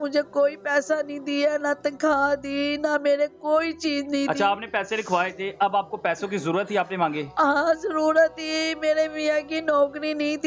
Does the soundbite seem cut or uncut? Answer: uncut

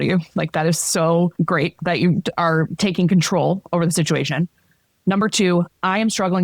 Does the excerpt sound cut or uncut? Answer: cut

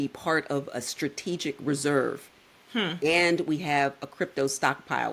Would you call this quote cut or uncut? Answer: uncut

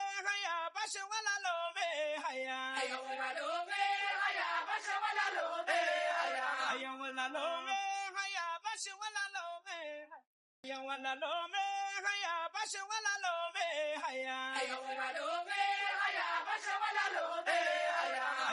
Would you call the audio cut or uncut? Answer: cut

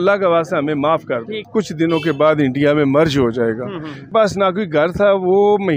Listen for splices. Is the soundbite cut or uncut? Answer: cut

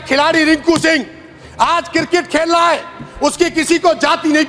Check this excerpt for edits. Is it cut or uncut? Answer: uncut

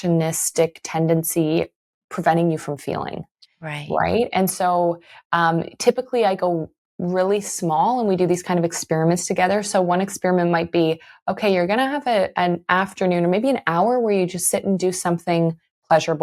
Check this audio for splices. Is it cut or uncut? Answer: uncut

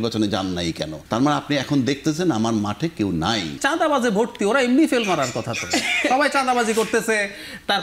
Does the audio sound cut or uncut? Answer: cut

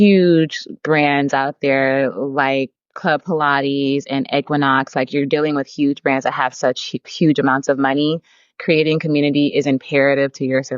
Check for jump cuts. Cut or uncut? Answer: cut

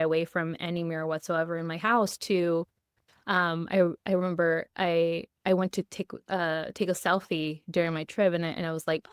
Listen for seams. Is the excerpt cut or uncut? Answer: uncut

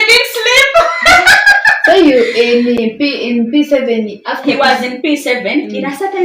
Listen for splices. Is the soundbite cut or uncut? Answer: uncut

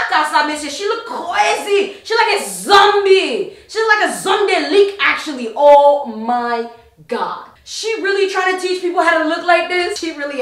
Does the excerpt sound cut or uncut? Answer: uncut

